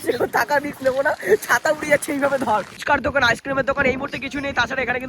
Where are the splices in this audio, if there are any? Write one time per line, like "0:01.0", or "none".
0:02.7